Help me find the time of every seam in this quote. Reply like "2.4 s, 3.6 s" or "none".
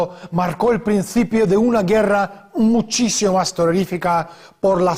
none